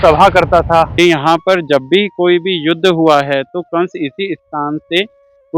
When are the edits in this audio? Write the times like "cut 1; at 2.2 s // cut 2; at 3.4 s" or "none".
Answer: cut 1; at 0.9 s